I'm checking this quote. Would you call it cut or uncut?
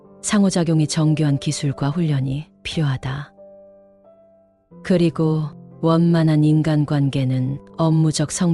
uncut